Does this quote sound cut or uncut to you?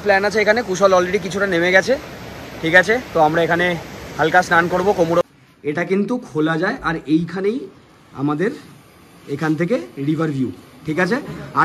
cut